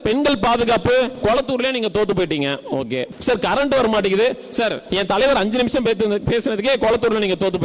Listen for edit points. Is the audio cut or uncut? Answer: cut